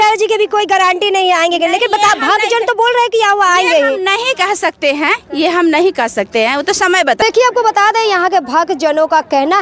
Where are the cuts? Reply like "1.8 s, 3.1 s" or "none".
7.2 s